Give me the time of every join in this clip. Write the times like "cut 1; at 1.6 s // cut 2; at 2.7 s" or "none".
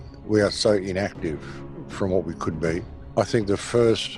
cut 1; at 3.0 s